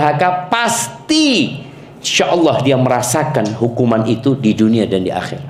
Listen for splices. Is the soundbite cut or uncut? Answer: uncut